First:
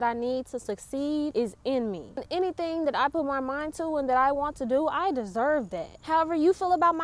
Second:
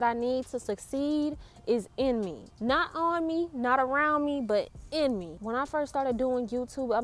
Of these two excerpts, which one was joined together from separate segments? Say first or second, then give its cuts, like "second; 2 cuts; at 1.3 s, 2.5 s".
first; 3 cuts; at 1.3 s, 2.1 s, 5.9 s